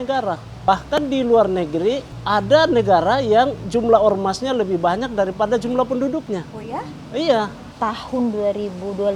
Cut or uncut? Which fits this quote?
cut